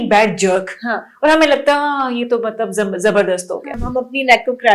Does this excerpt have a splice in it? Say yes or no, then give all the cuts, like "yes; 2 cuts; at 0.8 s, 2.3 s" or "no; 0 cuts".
yes; 1 cut; at 3.8 s